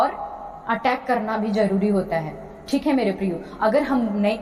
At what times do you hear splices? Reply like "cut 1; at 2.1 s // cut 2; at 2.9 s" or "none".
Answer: none